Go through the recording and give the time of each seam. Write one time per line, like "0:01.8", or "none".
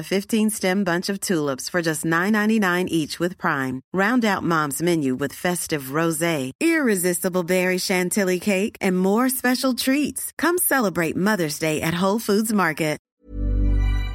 0:13.1